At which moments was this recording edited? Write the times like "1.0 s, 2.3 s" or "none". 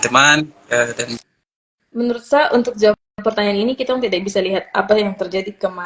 1.2 s

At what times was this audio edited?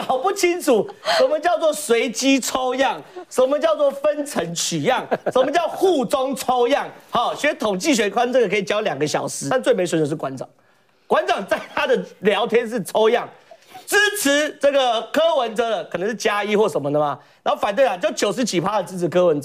9.4 s

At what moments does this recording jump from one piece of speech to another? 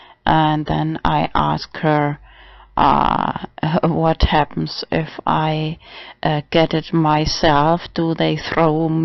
1.6 s

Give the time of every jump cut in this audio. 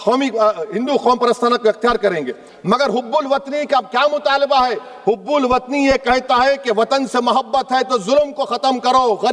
2.5 s

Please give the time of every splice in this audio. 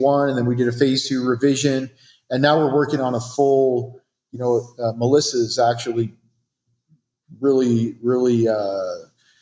none

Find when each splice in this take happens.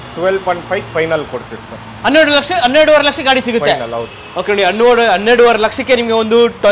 none

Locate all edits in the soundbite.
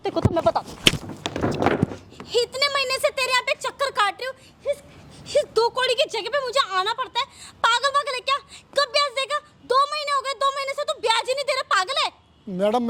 none

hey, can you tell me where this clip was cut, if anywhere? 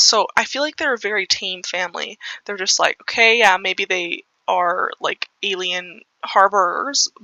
none

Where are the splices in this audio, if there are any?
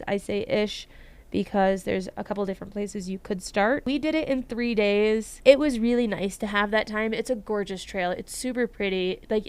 3.8 s, 5.3 s

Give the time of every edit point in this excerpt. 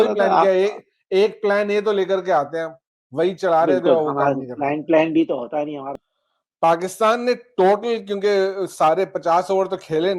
5.9 s

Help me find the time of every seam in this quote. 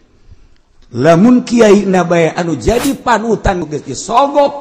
3.6 s

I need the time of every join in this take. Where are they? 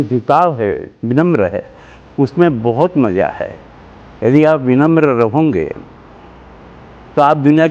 0.9 s

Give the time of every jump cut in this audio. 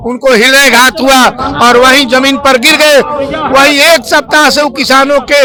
none

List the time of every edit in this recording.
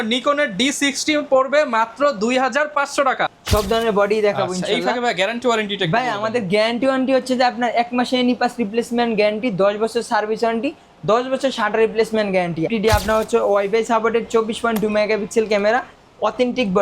3.3 s, 12.7 s

